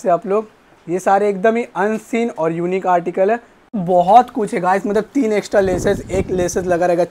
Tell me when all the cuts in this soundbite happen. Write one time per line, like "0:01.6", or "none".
0:03.8